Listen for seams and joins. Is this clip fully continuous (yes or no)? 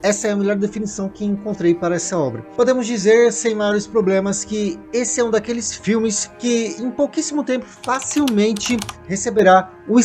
no